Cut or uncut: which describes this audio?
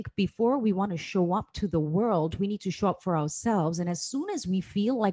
uncut